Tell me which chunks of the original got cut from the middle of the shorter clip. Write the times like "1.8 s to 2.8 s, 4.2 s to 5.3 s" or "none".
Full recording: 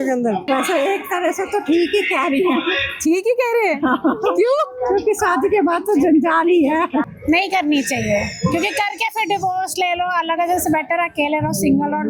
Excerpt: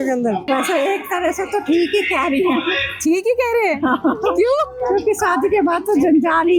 none